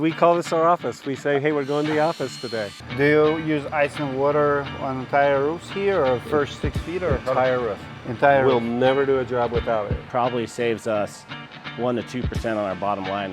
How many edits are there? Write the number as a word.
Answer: two